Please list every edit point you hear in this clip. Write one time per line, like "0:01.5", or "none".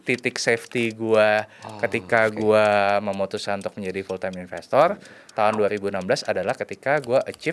none